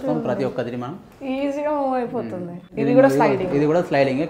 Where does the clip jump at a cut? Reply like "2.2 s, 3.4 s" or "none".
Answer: 2.7 s